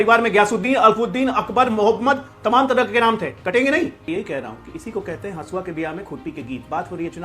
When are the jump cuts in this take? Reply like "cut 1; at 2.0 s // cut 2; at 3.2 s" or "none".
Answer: cut 1; at 4.0 s